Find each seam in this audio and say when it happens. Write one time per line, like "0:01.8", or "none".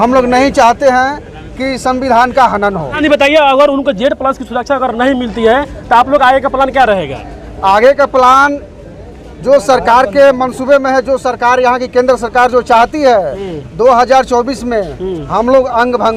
0:02.9